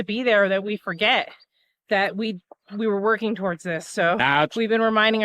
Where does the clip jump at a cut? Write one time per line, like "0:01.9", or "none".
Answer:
0:04.2